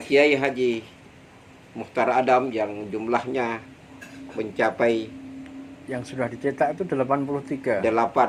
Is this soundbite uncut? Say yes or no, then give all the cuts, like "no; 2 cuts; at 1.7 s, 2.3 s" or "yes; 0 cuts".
yes; 0 cuts